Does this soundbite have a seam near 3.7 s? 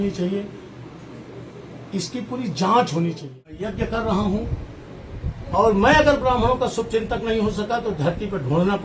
yes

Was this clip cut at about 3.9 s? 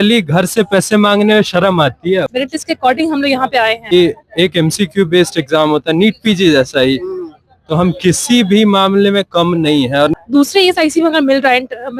yes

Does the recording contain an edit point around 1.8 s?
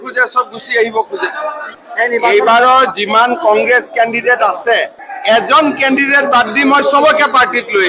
yes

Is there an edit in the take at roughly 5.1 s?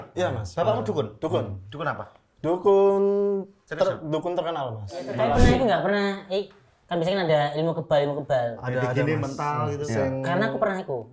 yes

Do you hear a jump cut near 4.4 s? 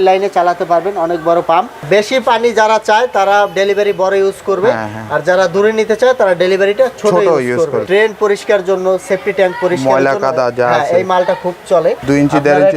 no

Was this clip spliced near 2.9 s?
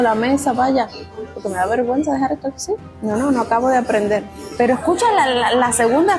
yes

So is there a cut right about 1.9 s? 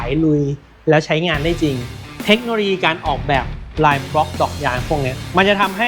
yes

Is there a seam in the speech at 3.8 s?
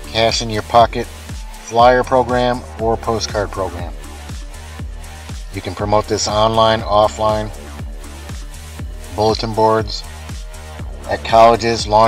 no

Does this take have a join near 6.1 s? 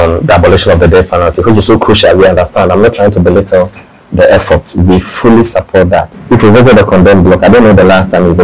yes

